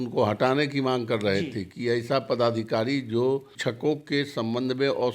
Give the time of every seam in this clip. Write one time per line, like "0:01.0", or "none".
0:03.5